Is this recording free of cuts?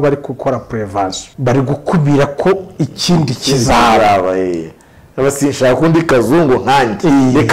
no; 1 cut; at 1.3 s

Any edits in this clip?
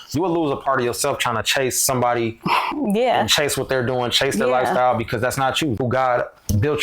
yes; 1 cut; at 5.8 s

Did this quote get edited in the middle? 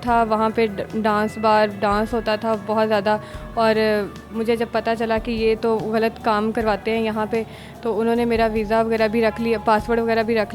no; 0 cuts

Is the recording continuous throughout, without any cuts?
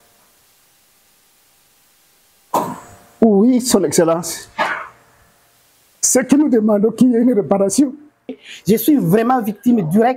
no; 1 cut; at 8.5 s

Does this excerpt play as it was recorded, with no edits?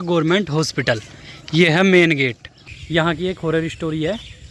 no; 1 cut; at 2.6 s

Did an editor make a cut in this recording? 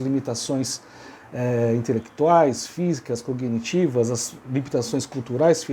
no; 0 cuts

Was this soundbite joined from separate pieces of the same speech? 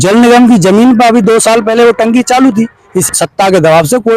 yes; 1 cut; at 2.9 s

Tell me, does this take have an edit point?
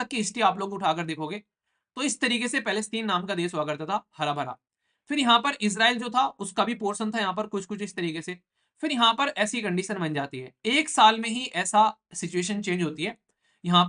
no; 0 cuts

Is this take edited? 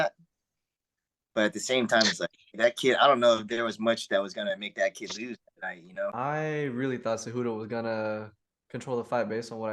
yes; 1 cut; at 6.1 s

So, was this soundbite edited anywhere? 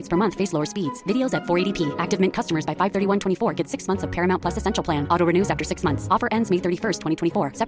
no; 0 cuts

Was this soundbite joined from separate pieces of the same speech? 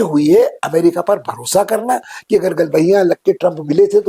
no; 0 cuts

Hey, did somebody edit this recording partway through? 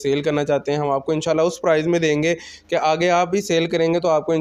no; 0 cuts

